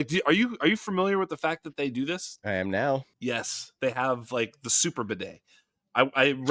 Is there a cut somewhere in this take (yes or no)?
yes